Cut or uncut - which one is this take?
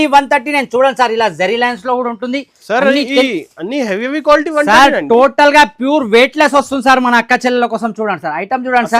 uncut